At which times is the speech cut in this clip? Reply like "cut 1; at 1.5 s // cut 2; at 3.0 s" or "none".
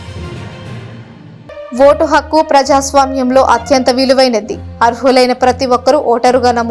cut 1; at 1.0 s